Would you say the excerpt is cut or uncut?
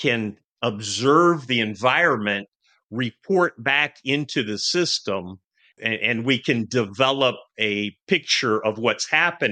cut